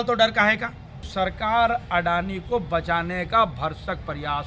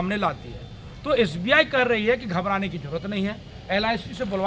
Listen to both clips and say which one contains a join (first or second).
first